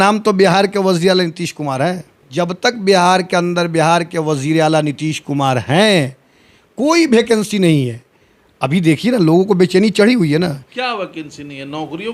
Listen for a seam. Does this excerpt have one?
yes; 1 cut; at 2.3 s

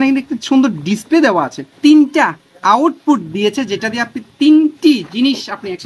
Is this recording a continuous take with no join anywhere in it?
no; 1 cut; at 1.7 s

